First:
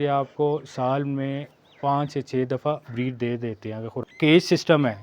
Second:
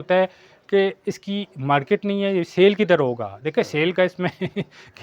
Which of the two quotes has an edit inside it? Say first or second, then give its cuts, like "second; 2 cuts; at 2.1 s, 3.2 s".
first; 1 cut; at 4.0 s